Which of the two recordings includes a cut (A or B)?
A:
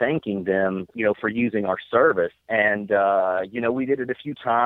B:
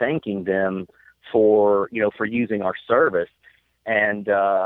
A